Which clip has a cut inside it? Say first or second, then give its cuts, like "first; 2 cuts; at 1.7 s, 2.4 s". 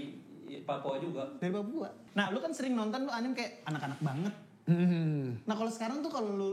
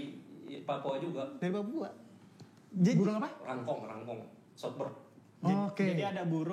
first; 1 cut; at 2.0 s